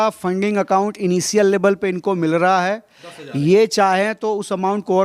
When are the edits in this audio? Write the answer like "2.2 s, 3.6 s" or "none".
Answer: none